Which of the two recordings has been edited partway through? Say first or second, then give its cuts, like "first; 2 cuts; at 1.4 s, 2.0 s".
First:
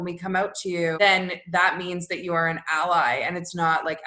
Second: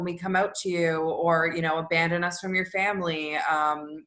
first; 1 cut; at 1.0 s